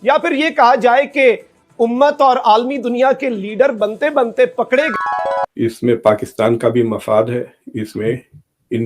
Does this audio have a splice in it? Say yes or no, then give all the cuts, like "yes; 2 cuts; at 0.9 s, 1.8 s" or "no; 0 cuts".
yes; 1 cut; at 4.9 s